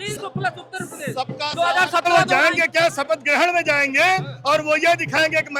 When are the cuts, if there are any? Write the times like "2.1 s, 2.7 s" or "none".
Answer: 2.1 s